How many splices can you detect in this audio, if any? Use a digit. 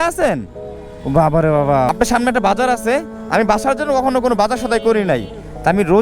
1